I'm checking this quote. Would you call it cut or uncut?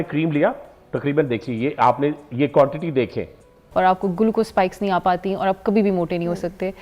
cut